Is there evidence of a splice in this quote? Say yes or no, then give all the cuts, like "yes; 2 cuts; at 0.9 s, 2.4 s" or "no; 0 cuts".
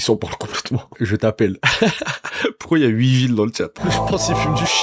yes; 1 cut; at 3.8 s